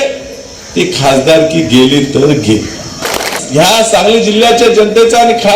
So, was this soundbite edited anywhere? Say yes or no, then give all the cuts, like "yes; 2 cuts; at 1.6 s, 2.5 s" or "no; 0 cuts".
yes; 1 cut; at 3.1 s